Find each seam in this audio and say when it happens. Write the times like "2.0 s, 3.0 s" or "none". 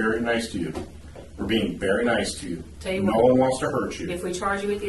none